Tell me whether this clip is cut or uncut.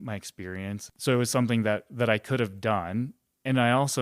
cut